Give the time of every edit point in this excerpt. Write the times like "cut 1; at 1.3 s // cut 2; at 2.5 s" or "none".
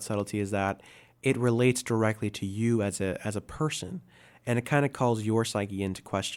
none